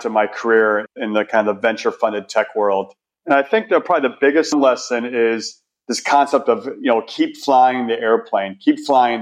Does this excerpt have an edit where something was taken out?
yes; 1 cut; at 4.5 s

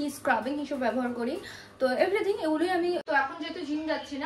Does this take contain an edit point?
yes; 1 cut; at 3.0 s

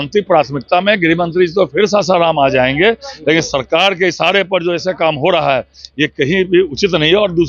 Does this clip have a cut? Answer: no; 0 cuts

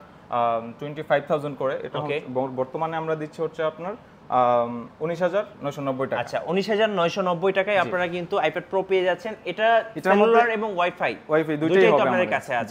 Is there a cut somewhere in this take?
no; 0 cuts

